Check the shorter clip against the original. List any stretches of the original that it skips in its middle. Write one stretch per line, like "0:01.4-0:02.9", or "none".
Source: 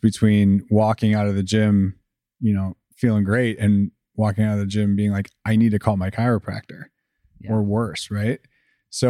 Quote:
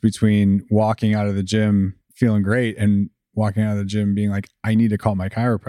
0:02.0-0:02.8